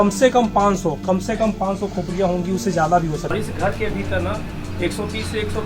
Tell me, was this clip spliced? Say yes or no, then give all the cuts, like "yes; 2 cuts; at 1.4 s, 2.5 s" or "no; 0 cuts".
yes; 1 cut; at 3.3 s